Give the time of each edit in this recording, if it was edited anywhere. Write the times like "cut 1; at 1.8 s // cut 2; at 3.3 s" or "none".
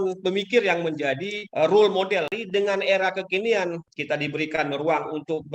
cut 1; at 1.4 s // cut 2; at 2.3 s // cut 3; at 3.8 s

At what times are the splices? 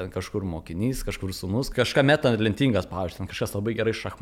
cut 1; at 1.7 s

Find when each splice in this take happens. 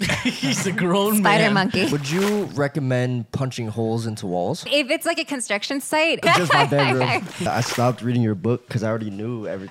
cut 1; at 1.9 s // cut 2; at 4.7 s // cut 3; at 6.2 s // cut 4; at 7.5 s

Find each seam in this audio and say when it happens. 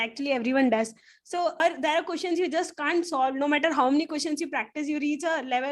cut 1; at 1.6 s

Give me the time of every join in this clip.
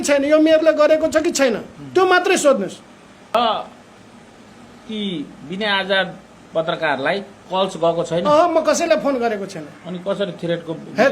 cut 1; at 3.3 s

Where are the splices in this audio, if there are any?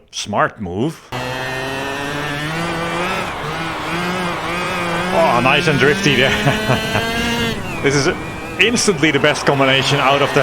cut 1; at 1.1 s

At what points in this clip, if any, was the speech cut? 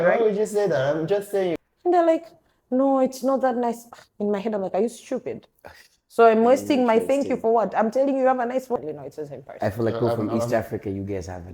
cut 1; at 1.6 s // cut 2; at 8.8 s

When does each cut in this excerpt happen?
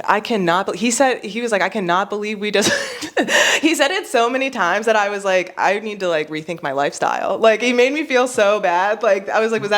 none

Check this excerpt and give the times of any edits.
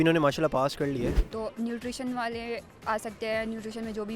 cut 1; at 1.2 s

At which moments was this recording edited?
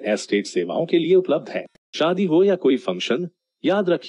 cut 1; at 1.8 s

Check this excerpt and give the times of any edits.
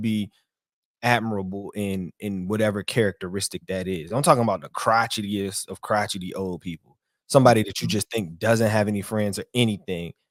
none

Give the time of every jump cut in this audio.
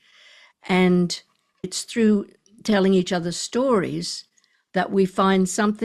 cut 1; at 1.7 s

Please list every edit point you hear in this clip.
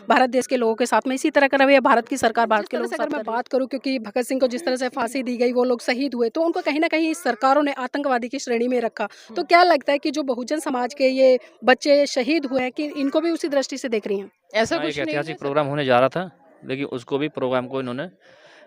cut 1; at 3.0 s // cut 2; at 15.1 s

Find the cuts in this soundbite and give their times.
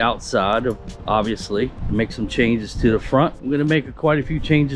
cut 1; at 1.8 s

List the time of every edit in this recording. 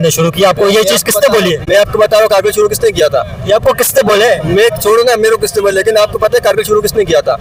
none

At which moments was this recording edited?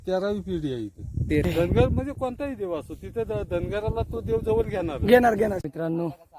cut 1; at 1.5 s // cut 2; at 5.6 s

